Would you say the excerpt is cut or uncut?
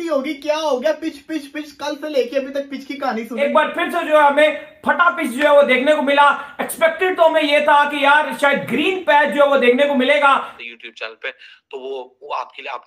cut